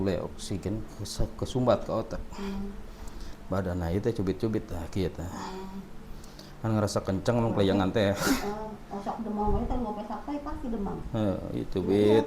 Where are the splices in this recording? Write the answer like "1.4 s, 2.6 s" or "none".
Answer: none